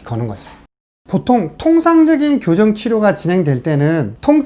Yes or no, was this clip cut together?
yes